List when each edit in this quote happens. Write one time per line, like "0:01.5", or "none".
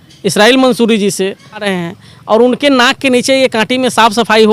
0:01.7